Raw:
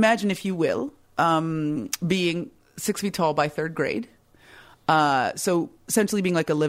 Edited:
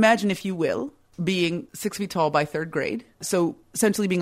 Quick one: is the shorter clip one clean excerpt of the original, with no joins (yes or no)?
no